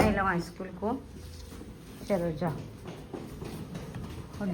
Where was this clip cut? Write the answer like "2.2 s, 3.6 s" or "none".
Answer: none